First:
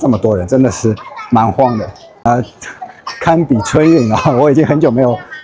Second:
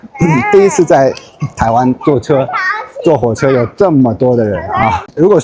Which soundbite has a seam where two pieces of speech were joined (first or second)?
first